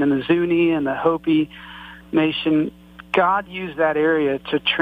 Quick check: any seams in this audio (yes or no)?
no